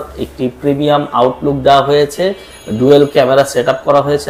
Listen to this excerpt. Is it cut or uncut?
uncut